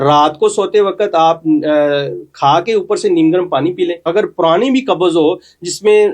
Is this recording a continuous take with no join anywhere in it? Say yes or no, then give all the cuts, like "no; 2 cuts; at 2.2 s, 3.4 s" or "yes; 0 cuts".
no; 1 cut; at 4.1 s